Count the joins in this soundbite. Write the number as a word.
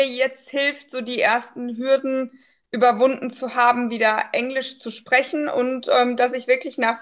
zero